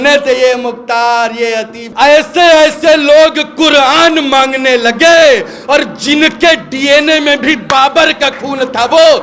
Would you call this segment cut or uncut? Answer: cut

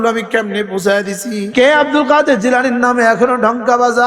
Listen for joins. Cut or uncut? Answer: cut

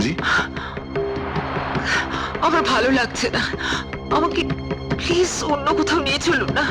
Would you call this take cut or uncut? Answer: uncut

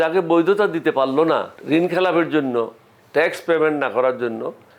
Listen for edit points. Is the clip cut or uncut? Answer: cut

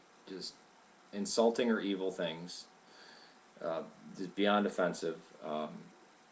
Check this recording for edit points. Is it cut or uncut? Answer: cut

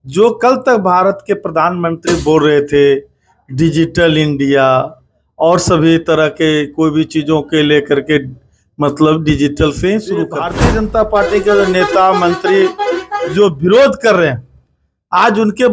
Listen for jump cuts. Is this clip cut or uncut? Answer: cut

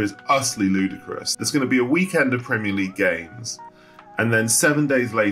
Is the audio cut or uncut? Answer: cut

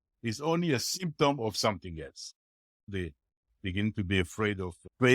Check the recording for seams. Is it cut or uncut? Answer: cut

